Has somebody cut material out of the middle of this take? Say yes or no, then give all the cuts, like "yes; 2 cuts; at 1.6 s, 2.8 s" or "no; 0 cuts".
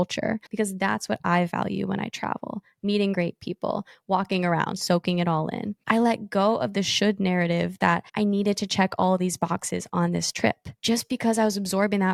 no; 0 cuts